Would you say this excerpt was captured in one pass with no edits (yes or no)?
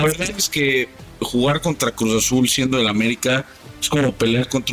yes